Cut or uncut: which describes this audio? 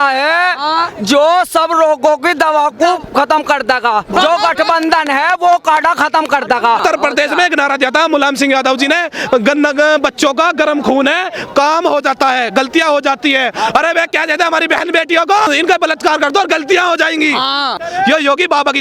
cut